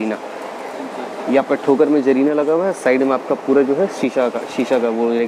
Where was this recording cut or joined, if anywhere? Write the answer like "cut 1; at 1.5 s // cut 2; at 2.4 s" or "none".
none